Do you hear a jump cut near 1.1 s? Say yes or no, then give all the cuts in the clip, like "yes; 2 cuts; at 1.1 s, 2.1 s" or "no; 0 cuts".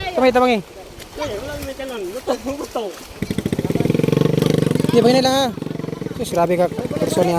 no; 1 cut; at 3.2 s